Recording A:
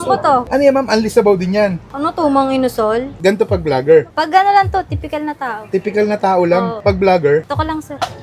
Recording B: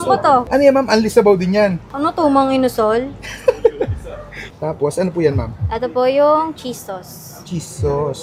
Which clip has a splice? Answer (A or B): A